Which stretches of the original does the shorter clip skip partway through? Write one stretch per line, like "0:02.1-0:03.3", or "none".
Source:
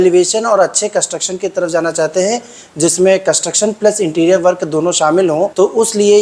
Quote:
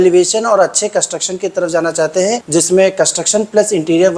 0:02.4-0:02.7